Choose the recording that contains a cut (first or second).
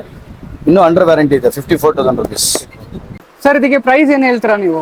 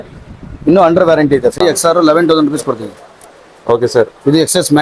second